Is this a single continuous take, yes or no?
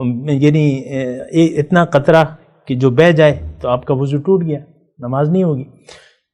yes